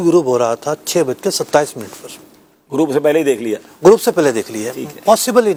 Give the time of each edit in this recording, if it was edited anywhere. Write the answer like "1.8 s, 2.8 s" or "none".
none